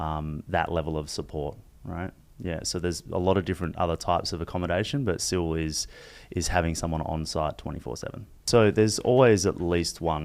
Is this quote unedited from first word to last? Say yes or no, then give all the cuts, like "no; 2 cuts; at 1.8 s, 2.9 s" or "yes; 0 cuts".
no; 1 cut; at 8.4 s